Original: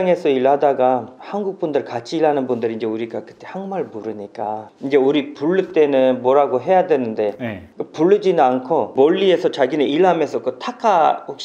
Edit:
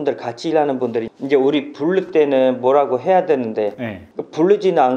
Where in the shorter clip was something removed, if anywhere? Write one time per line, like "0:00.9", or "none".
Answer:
0:01.1